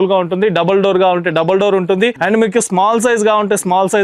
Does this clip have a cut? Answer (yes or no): no